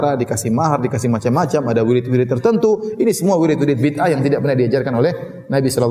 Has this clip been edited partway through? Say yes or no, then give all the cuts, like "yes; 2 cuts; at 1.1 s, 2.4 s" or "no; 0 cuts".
no; 0 cuts